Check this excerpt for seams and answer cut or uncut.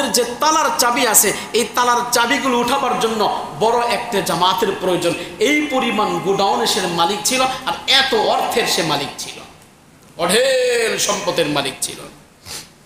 uncut